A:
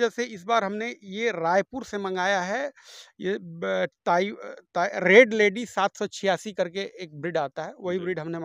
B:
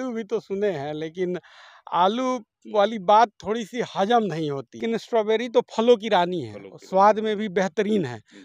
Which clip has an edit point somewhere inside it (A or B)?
B